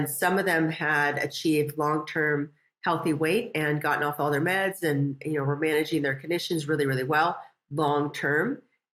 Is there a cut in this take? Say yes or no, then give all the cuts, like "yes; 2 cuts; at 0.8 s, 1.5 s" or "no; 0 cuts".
no; 0 cuts